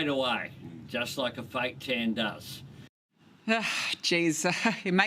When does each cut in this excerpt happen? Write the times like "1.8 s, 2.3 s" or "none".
none